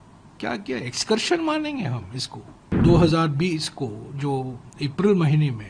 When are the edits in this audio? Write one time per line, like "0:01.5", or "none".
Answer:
0:02.7